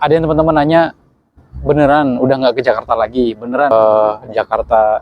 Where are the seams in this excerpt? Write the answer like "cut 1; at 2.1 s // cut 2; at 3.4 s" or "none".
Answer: cut 1; at 3.7 s